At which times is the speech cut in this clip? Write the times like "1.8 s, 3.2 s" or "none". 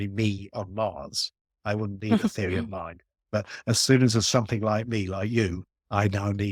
none